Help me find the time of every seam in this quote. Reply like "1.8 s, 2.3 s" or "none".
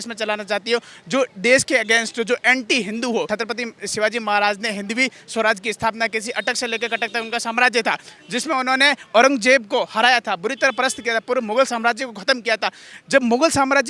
3.3 s